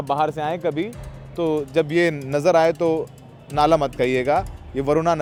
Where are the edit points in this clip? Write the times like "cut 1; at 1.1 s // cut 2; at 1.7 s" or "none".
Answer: none

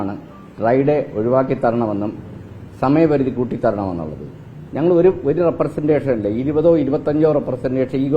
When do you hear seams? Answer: none

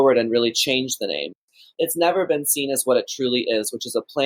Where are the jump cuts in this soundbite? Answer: cut 1; at 1.5 s

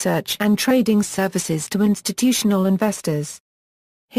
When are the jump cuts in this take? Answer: cut 1; at 1.3 s

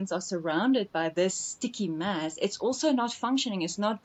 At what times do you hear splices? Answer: none

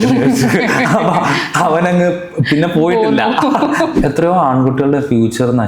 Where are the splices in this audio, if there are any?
cut 1; at 3.9 s

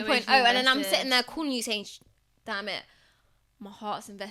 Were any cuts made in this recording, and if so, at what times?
none

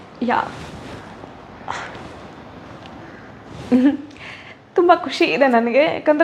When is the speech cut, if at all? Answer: none

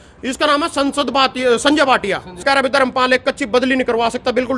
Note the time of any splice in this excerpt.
cut 1; at 2.4 s

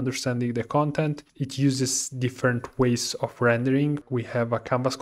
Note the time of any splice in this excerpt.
cut 1; at 4.0 s

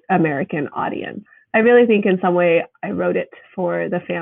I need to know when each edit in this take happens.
cut 1; at 1.3 s

